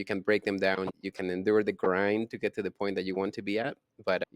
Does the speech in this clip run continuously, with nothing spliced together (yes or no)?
no